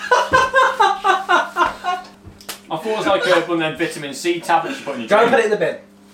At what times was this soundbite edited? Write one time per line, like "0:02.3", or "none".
0:02.0